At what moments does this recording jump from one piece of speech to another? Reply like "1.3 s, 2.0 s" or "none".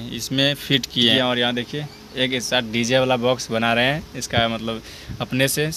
1.1 s